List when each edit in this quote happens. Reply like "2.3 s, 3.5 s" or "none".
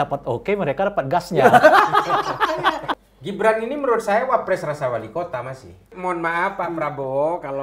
3.0 s, 5.9 s